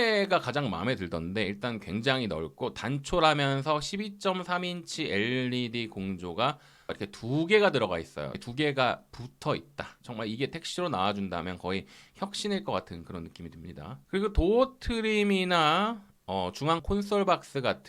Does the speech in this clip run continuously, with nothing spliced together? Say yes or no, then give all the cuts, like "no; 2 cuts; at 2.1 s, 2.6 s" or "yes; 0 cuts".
yes; 0 cuts